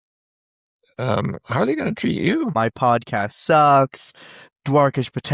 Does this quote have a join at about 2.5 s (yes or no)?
yes